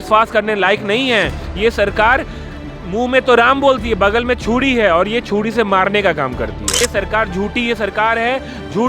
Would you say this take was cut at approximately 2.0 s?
no; 1 cut; at 6.8 s

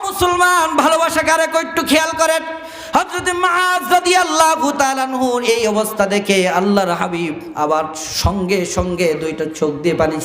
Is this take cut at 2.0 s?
no; 1 cut; at 8.0 s

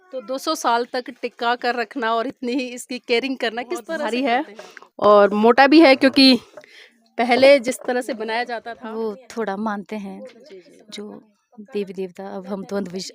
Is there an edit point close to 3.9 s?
yes; 2 cuts; at 3.9 s, 8.5 s

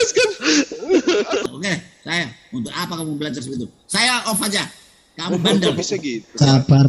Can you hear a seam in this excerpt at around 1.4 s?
yes; 1 cut; at 1.4 s

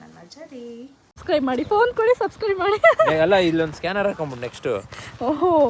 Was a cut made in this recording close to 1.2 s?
yes; 1 cut; at 1.2 s

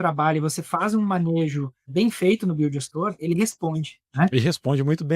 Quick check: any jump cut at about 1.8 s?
yes; 1 cut; at 1.8 s

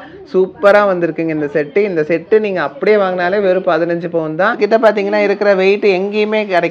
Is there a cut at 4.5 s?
yes; 1 cut; at 4.5 s

